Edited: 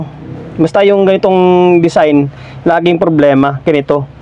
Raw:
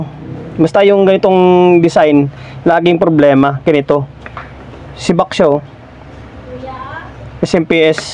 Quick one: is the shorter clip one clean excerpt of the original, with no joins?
yes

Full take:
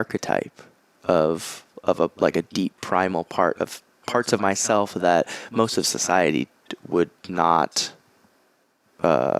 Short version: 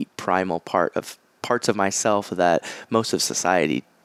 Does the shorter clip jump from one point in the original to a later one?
no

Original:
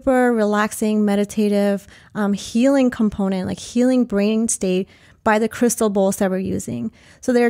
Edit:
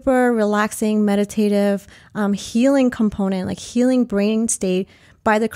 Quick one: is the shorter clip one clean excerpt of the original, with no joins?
yes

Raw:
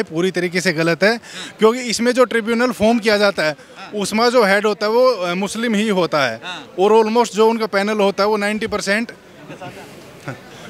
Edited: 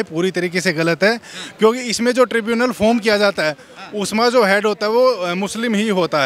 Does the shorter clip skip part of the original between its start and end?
no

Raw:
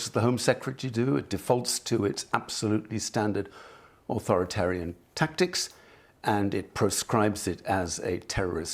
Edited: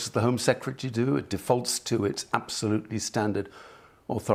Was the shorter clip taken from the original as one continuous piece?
yes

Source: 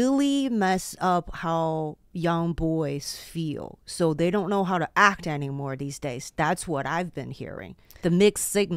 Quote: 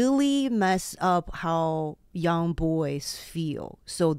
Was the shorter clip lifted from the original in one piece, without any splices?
yes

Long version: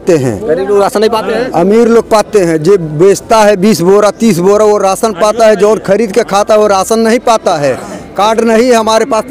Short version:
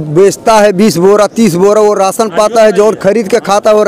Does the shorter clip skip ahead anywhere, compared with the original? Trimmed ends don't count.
no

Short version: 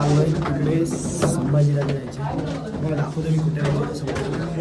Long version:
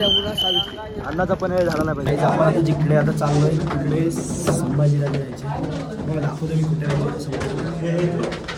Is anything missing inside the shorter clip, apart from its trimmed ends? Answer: no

